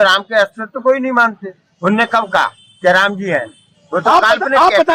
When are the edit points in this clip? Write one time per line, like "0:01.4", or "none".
none